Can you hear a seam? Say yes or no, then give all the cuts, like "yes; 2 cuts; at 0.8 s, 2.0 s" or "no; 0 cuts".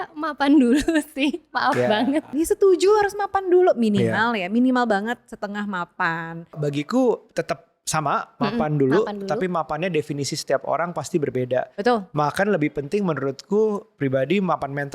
yes; 2 cuts; at 2.3 s, 6.5 s